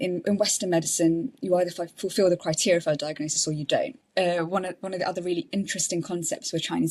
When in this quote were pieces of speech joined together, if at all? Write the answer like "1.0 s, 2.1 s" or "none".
4.0 s